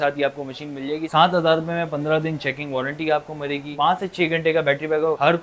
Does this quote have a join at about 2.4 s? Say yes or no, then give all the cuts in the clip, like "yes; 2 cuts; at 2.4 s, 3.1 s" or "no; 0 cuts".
no; 2 cuts; at 1.1 s, 3.7 s